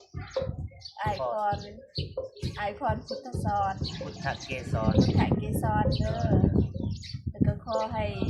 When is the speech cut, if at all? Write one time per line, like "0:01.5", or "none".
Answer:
none